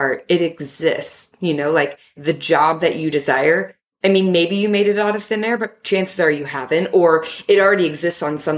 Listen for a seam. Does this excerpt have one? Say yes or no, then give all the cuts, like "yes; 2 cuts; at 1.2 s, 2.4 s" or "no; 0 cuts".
yes; 1 cut; at 2.2 s